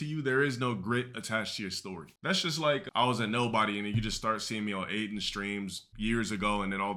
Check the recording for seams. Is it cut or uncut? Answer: uncut